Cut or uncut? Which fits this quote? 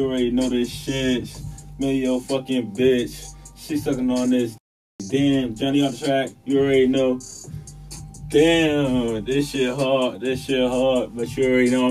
uncut